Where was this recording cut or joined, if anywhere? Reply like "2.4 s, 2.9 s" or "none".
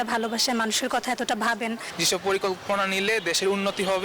1.8 s